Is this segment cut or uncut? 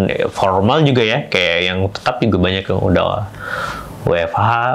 uncut